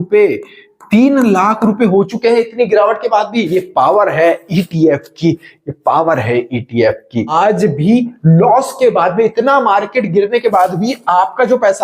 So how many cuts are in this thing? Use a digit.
2